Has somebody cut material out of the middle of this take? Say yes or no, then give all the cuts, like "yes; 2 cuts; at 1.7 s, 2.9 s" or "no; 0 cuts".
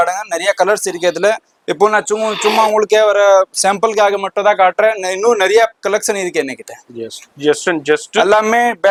no; 0 cuts